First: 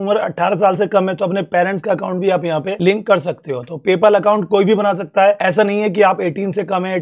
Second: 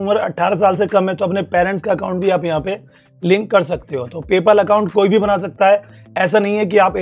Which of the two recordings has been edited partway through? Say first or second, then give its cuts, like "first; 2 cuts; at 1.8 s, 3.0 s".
first; 2 cuts; at 2.7 s, 5.4 s